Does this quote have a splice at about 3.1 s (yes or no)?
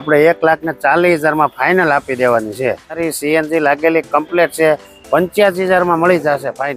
yes